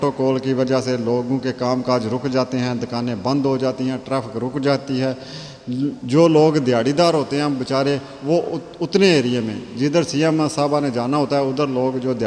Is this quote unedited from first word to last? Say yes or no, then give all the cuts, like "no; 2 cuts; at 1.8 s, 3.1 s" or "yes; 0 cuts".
yes; 0 cuts